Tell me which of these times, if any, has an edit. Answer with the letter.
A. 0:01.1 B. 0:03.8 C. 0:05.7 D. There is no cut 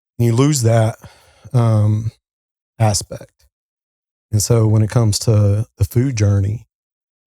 D